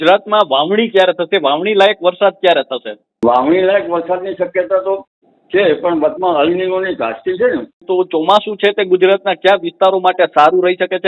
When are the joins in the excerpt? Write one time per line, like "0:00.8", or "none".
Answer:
0:03.0
0:07.8